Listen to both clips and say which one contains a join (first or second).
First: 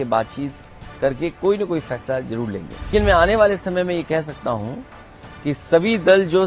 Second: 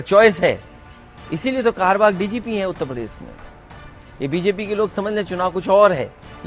first